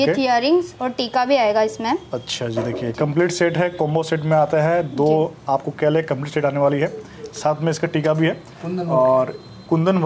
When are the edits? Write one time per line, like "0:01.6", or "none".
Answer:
none

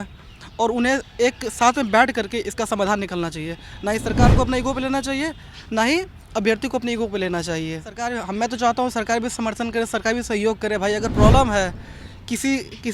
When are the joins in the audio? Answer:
0:08.1

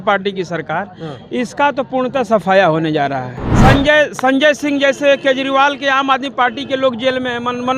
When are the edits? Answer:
0:03.4

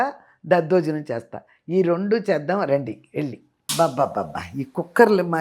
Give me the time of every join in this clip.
0:03.6

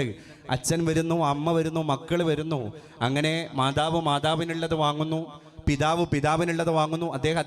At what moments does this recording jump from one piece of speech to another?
none

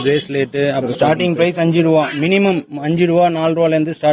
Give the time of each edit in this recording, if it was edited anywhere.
0:00.9

